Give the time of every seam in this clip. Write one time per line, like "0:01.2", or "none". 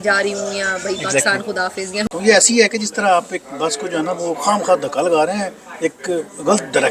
0:02.1